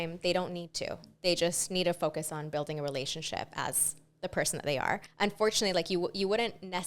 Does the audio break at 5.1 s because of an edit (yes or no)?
yes